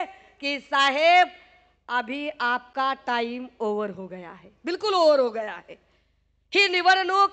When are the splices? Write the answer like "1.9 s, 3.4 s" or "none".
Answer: none